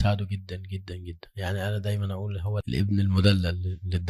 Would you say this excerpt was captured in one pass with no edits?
no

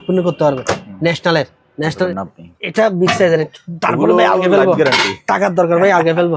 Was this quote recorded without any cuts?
no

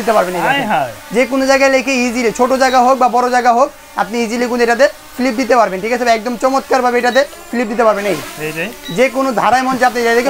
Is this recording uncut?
yes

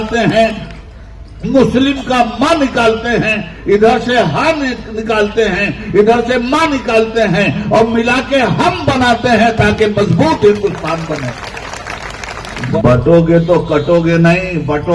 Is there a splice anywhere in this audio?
yes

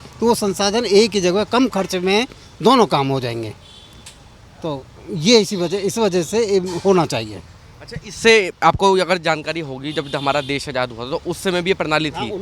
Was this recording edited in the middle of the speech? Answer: no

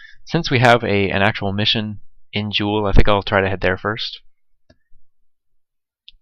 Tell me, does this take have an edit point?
no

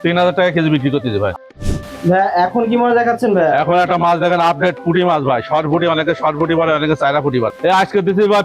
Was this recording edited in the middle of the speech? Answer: yes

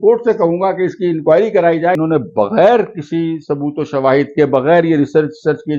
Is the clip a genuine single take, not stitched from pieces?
no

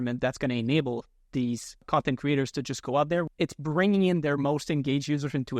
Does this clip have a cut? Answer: yes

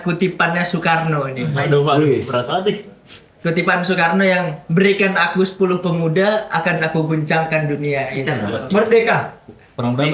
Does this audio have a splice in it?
no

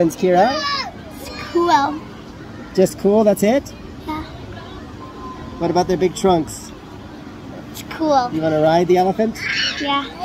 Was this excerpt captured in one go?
yes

